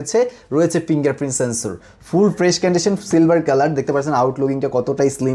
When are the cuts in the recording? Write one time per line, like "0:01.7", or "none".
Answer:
none